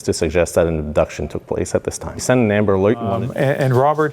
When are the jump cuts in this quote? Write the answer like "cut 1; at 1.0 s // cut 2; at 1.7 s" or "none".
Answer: cut 1; at 2.2 s // cut 2; at 3.2 s